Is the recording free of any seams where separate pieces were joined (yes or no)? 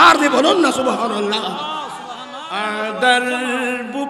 no